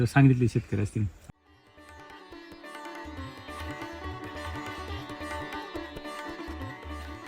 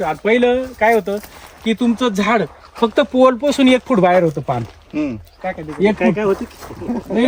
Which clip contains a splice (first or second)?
first